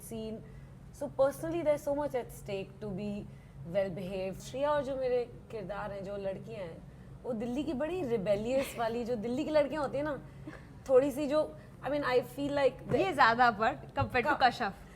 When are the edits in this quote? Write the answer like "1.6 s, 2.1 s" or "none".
4.4 s